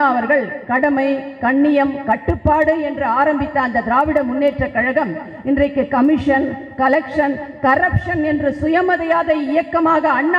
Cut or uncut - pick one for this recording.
uncut